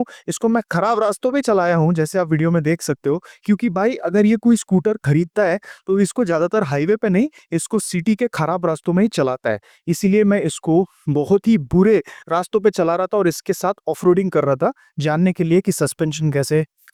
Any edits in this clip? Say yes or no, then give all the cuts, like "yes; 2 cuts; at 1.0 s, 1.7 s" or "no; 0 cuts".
no; 0 cuts